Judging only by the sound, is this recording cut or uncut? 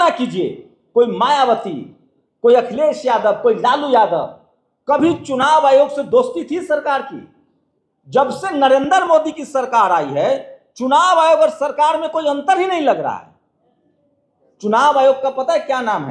uncut